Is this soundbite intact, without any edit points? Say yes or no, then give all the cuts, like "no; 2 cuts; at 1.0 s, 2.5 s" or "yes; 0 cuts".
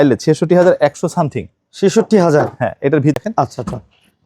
no; 1 cut; at 3.1 s